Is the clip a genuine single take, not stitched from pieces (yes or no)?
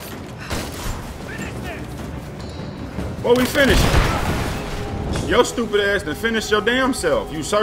no